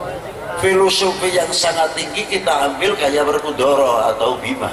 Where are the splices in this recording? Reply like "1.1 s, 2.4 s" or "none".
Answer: none